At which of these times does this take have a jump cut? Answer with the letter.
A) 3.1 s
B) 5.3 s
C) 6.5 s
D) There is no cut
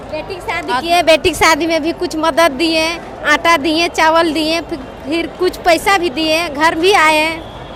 D